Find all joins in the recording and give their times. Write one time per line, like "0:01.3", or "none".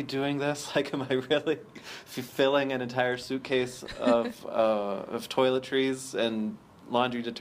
none

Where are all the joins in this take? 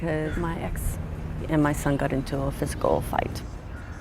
0:02.5

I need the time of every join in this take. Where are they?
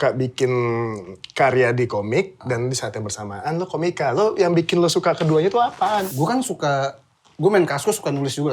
0:06.1

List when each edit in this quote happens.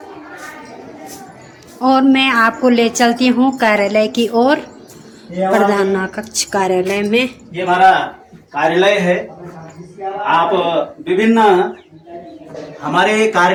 none

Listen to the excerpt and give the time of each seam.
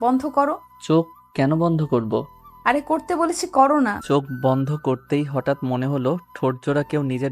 0:04.0

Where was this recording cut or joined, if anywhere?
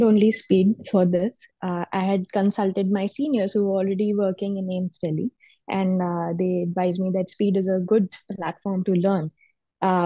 none

